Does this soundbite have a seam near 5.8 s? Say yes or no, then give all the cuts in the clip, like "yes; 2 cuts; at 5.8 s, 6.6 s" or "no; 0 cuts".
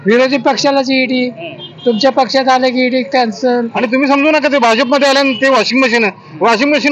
no; 1 cut; at 3.8 s